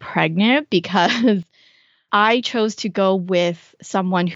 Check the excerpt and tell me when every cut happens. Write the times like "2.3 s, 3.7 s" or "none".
2.0 s